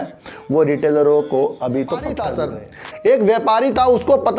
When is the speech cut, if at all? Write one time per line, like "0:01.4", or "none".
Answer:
0:02.3